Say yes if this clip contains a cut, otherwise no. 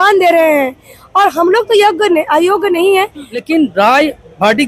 yes